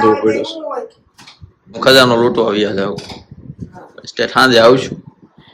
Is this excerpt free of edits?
no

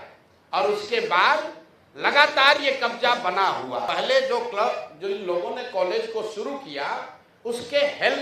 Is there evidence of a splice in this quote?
yes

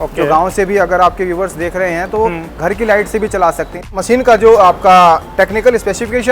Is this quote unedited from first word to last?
no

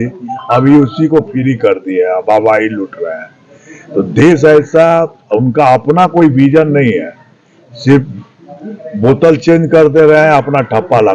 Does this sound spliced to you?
no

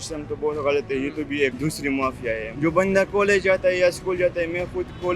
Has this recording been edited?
yes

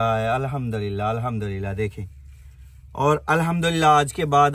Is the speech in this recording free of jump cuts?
yes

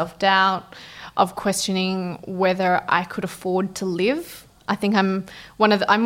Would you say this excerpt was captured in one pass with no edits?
yes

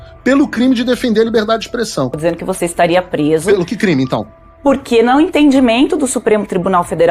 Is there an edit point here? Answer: yes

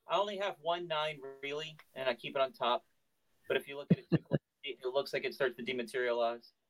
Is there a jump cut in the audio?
no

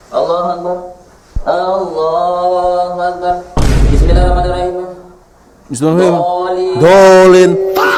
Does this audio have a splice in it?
no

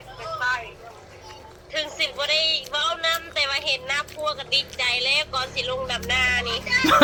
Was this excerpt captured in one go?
yes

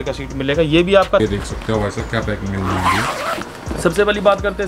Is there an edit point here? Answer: yes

